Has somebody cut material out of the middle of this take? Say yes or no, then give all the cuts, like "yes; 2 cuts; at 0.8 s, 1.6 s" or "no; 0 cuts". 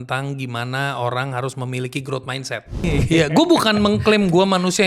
yes; 1 cut; at 2.8 s